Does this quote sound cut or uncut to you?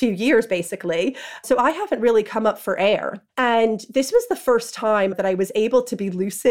cut